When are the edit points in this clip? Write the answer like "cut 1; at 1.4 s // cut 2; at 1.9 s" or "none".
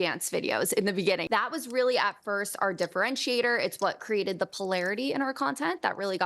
cut 1; at 1.2 s

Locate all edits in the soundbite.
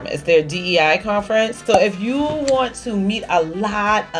cut 1; at 1.6 s

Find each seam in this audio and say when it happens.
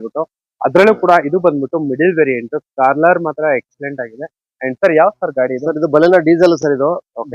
none

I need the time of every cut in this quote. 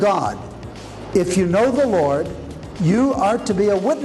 none

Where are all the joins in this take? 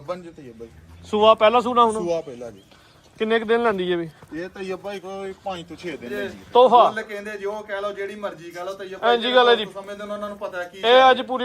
cut 1; at 6.1 s

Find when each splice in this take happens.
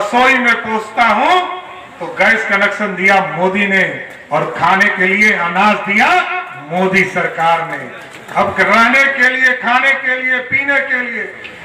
none

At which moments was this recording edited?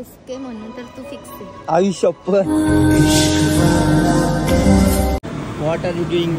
cut 1; at 5.2 s

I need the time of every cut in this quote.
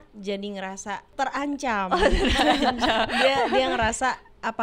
cut 1; at 1.1 s

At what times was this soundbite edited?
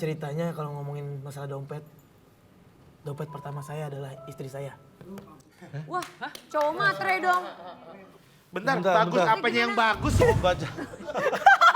cut 1; at 10.2 s

